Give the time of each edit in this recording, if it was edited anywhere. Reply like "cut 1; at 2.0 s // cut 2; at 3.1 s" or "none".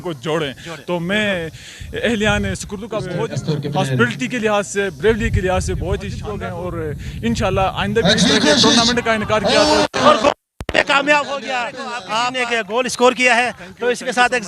cut 1; at 3.1 s // cut 2; at 6.2 s // cut 3; at 12.4 s